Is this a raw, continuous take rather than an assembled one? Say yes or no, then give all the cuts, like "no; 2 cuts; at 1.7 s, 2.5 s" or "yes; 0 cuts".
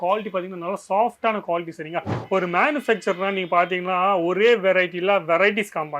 no; 1 cut; at 2.1 s